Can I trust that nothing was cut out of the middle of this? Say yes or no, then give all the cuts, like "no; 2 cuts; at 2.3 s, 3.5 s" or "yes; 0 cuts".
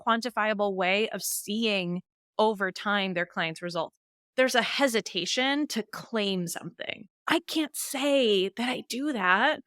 no; 1 cut; at 4.2 s